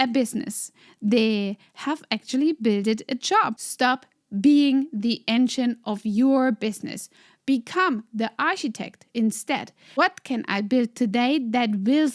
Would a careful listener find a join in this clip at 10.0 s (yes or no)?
yes